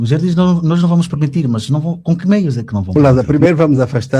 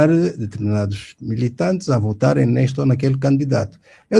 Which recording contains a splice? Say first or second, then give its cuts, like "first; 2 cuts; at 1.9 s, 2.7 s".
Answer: first; 1 cut; at 3.0 s